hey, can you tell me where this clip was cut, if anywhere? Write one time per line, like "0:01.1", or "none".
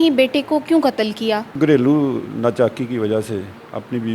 0:01.5